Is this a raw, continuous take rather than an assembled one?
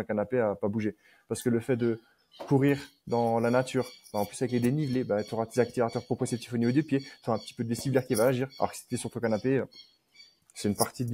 yes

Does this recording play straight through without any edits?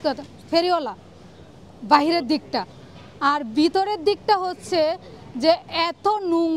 yes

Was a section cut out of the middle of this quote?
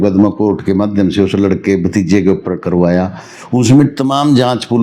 no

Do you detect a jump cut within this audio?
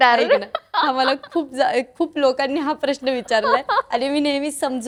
no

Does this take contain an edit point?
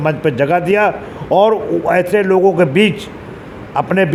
no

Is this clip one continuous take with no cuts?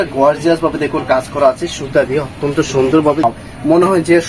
no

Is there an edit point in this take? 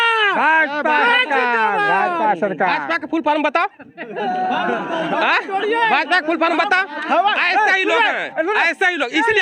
no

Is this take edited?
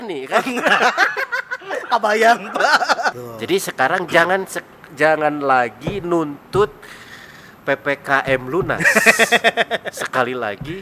yes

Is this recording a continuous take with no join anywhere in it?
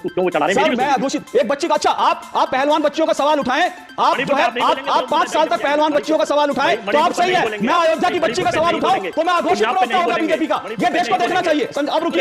yes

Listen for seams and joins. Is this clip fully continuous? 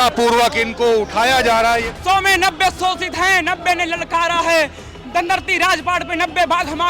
no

